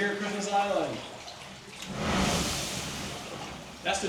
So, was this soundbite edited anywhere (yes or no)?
no